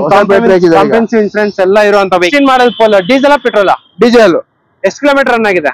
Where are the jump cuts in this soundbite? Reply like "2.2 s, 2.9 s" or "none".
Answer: 2.3 s